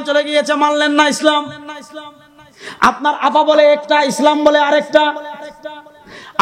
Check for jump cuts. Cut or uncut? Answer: uncut